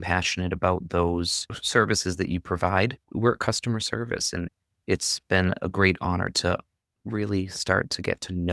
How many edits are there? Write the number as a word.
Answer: three